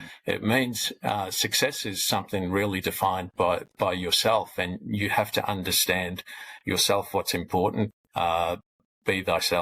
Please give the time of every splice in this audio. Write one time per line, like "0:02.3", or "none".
0:08.0